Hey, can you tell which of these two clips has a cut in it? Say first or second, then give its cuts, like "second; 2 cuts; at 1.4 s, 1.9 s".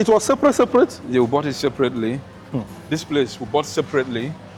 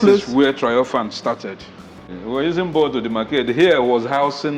second; 1 cut; at 2.2 s